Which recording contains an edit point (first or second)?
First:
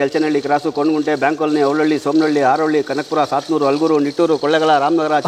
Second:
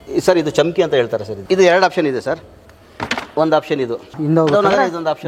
second